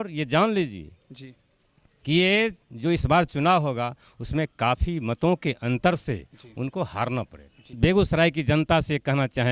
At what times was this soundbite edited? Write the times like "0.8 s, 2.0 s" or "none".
7.8 s